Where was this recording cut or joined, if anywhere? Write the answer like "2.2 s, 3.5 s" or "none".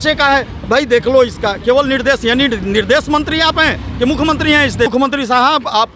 4.9 s